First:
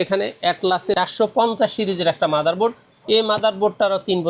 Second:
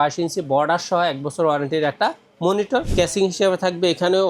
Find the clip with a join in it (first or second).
second